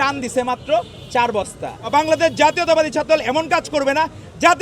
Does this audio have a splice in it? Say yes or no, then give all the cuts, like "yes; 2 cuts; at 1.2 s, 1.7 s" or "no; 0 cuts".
yes; 1 cut; at 1.9 s